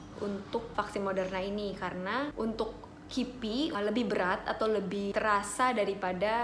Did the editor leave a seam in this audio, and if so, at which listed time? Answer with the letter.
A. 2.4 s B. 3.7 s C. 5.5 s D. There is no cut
B